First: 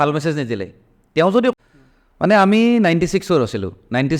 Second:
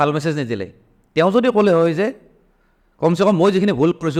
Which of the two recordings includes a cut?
first; 1 cut; at 1.5 s

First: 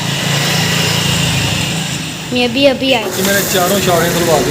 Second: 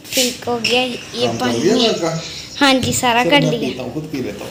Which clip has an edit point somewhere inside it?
first; 1 cut; at 3.1 s

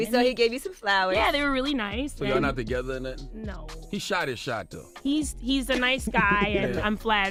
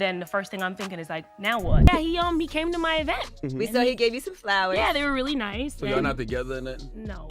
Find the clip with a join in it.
second; 1 cut; at 1.9 s

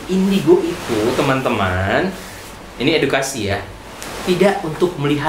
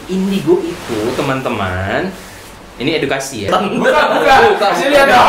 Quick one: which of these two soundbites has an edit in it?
second; 1 cut; at 3.5 s

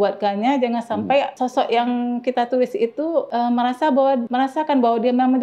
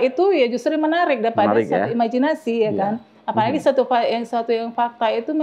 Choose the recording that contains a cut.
first; 3 cuts; at 1.3 s, 3.3 s, 4.3 s

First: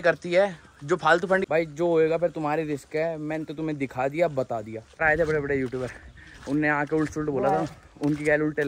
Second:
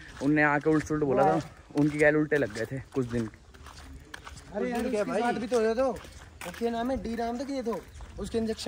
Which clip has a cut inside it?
first; 2 cuts; at 1.4 s, 5.0 s

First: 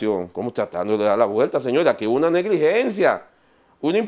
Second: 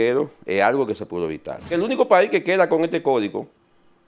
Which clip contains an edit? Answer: second; 1 cut; at 1.7 s

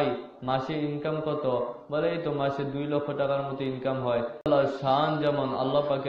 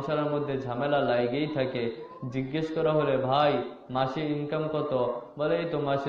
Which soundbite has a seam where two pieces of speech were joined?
first; 1 cut; at 4.4 s

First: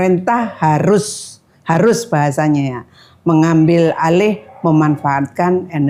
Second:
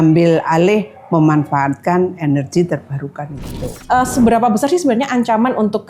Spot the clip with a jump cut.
second; 1 cut; at 3.6 s

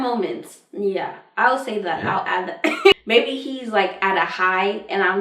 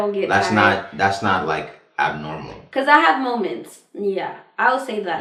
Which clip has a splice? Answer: first; 1 cut; at 2.9 s

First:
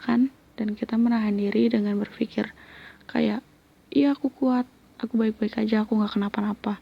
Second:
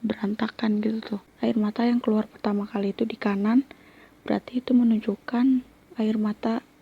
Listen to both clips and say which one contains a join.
second; 1 cut; at 1.2 s

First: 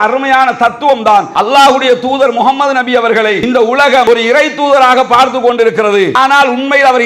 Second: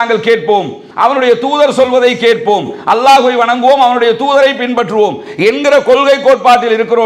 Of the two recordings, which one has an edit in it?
first; 2 cuts; at 1.3 s, 3.8 s

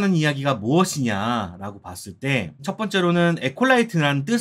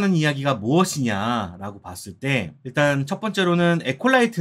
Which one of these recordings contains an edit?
first; 1 cut; at 2.6 s

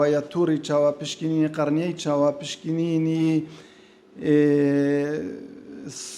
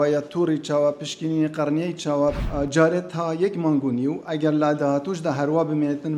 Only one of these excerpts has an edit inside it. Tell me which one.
second; 1 cut; at 2.4 s

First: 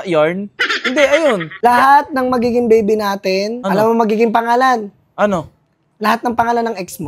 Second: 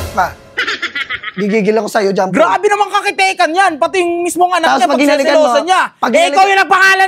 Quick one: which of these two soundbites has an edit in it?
first; 2 cuts; at 1.6 s, 3.6 s

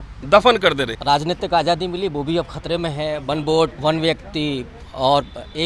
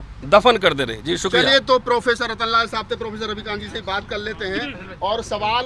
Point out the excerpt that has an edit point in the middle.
first; 2 cuts; at 0.9 s, 3.8 s

